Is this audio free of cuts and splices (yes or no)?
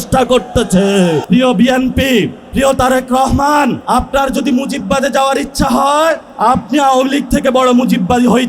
no